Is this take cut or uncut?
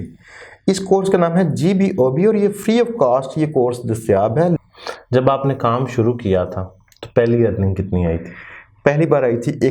cut